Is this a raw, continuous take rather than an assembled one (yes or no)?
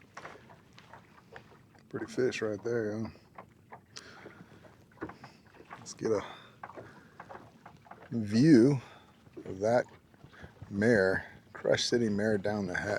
yes